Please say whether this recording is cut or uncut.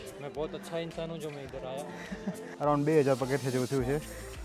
cut